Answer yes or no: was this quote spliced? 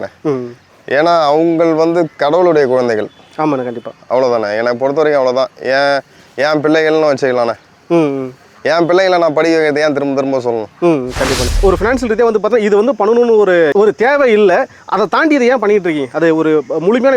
yes